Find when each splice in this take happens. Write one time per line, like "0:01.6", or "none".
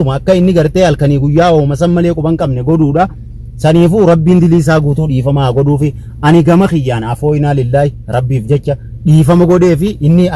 none